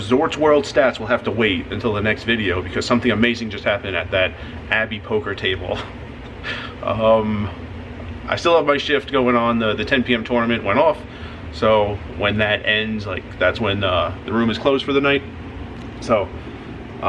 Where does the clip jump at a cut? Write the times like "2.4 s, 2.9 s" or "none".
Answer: none